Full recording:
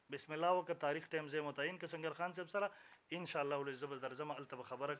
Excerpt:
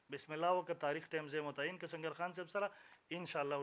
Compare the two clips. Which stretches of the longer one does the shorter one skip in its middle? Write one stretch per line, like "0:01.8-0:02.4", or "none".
none